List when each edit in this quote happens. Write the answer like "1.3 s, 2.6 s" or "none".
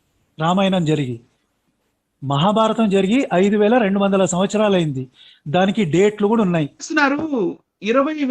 6.8 s